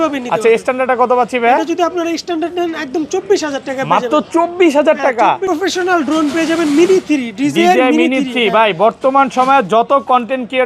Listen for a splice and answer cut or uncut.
cut